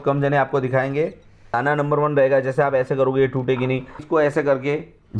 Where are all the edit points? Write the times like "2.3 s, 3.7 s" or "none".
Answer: 1.6 s, 4.0 s